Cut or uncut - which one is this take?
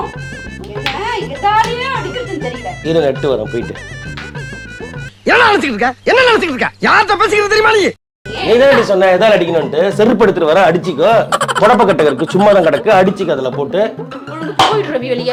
uncut